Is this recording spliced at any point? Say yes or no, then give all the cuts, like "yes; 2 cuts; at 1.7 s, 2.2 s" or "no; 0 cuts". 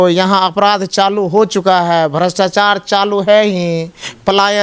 no; 0 cuts